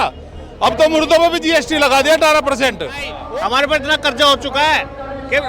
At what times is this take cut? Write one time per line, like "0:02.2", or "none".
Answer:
0:03.1